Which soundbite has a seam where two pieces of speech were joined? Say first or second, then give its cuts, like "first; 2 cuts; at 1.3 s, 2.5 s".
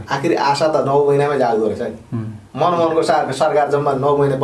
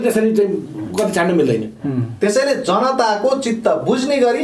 second; 1 cut; at 1.8 s